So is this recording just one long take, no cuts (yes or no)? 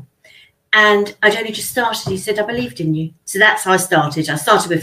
no